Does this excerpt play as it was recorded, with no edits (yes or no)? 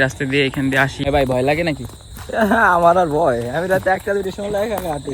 no